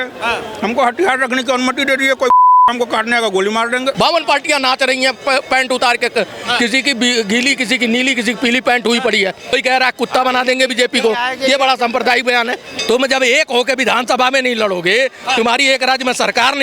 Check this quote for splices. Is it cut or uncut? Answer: cut